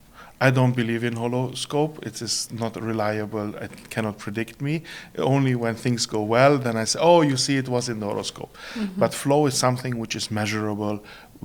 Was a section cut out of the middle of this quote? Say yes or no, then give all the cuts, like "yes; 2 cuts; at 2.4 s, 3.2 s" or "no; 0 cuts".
no; 0 cuts